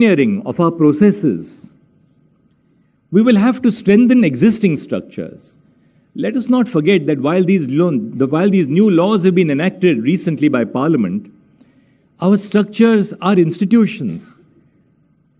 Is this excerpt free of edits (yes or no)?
yes